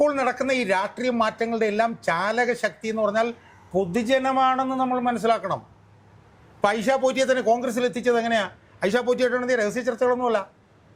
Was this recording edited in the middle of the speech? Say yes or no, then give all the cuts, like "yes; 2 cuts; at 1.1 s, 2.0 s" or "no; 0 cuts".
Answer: no; 0 cuts